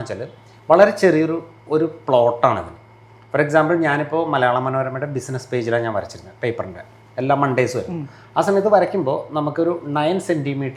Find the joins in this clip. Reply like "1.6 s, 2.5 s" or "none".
none